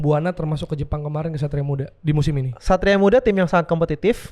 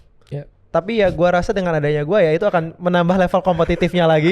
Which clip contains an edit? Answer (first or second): first